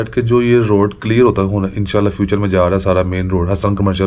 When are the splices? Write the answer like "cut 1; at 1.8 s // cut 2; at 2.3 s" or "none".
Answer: none